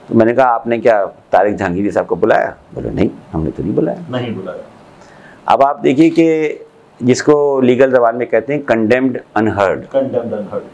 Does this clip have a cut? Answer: no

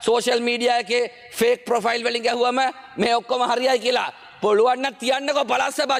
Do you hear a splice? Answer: no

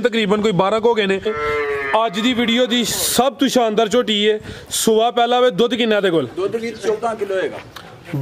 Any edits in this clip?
yes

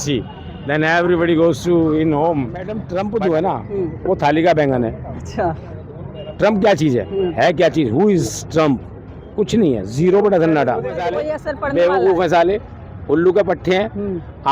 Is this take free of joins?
no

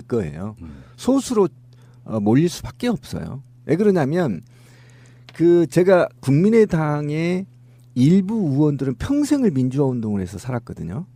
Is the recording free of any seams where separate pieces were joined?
yes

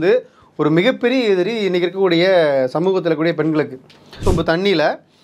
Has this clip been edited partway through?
yes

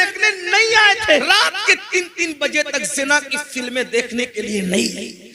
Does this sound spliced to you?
yes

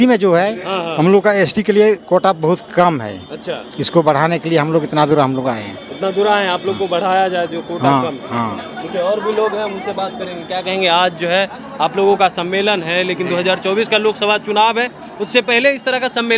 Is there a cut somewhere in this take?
no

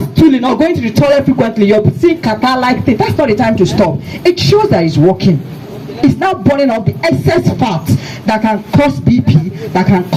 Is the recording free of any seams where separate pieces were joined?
yes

